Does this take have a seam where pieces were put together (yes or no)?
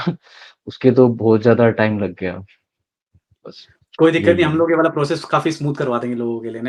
no